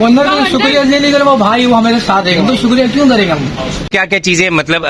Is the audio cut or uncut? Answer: cut